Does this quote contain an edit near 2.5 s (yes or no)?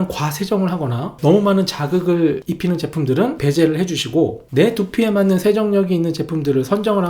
yes